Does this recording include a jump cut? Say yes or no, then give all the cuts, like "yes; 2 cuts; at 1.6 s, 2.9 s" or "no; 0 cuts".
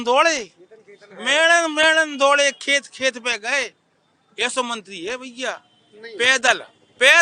no; 0 cuts